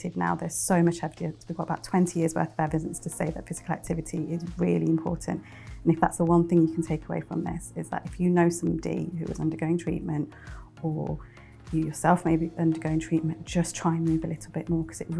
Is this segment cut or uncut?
uncut